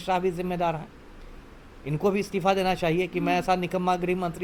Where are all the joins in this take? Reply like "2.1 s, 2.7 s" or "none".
none